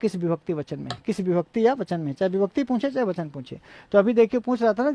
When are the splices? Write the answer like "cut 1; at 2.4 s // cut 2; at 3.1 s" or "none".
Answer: none